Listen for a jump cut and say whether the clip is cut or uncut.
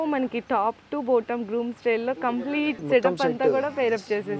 cut